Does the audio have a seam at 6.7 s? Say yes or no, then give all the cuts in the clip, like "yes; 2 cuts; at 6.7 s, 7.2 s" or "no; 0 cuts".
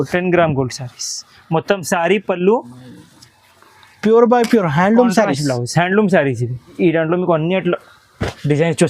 yes; 1 cut; at 6.7 s